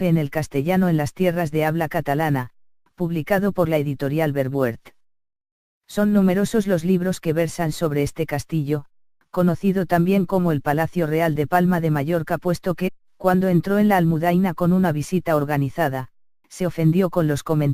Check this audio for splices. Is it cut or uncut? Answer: uncut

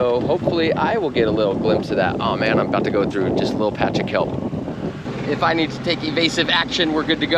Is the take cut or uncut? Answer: cut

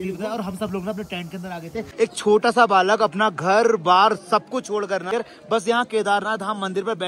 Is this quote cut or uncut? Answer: cut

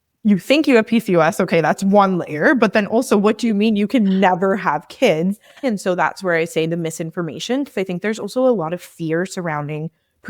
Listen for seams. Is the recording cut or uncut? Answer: cut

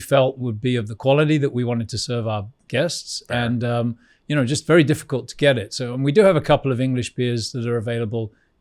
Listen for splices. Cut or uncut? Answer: uncut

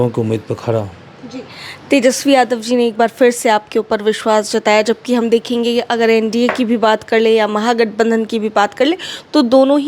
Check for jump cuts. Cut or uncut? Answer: uncut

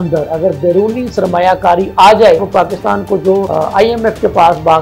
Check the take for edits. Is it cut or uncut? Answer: cut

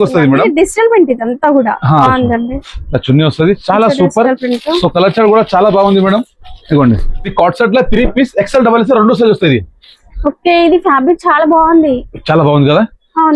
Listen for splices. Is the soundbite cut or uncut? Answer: cut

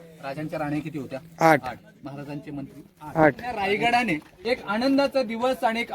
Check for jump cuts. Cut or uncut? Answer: cut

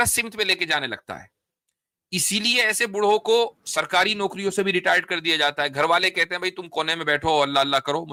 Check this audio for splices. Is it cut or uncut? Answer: uncut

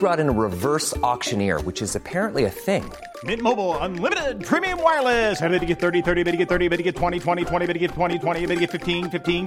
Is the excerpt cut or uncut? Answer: uncut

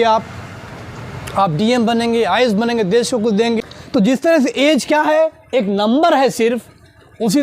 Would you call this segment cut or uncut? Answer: cut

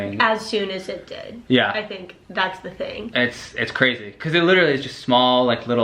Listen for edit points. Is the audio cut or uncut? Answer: uncut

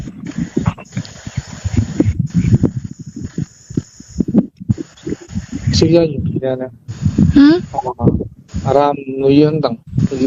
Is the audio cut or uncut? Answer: uncut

